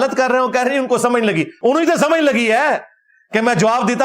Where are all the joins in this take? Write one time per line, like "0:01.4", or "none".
0:01.5